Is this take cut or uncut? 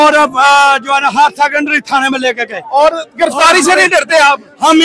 uncut